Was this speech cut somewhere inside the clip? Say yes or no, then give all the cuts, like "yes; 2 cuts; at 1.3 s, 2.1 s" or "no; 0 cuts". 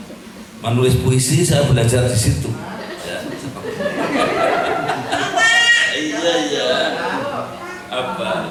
no; 0 cuts